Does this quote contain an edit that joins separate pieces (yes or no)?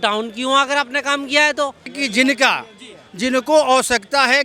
yes